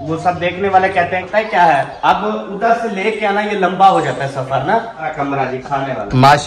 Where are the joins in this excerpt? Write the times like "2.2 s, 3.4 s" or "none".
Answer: 1.2 s, 5.1 s